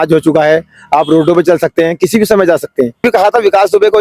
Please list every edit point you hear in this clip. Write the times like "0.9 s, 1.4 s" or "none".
3.0 s